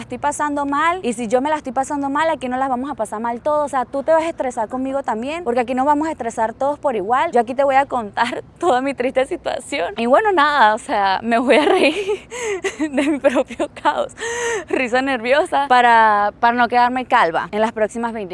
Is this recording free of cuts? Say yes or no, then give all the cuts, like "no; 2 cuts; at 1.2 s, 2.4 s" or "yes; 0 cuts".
yes; 0 cuts